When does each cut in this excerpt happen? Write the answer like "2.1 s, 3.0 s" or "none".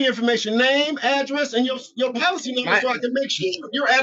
none